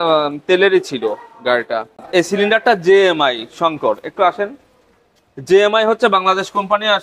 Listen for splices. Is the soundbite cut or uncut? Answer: cut